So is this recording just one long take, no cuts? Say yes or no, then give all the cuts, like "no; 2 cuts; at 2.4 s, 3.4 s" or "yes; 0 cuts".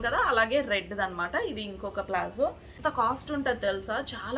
no; 1 cut; at 2.8 s